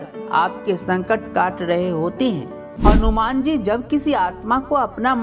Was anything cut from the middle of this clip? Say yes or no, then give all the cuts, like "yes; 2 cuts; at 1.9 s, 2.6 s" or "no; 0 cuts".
yes; 1 cut; at 2.6 s